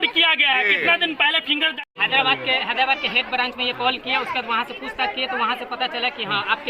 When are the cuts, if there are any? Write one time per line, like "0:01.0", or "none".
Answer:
0:01.9